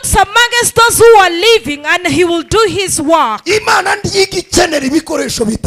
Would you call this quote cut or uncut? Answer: uncut